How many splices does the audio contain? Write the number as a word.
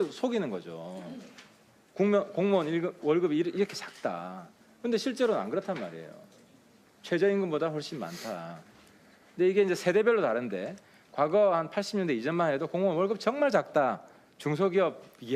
zero